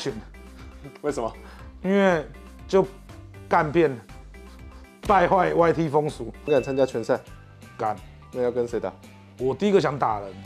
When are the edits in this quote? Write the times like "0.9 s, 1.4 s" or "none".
6.5 s